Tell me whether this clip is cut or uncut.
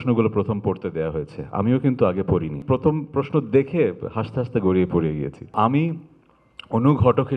cut